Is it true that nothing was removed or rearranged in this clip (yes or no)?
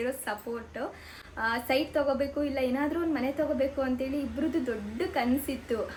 yes